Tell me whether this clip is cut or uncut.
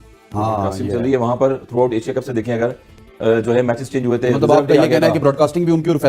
uncut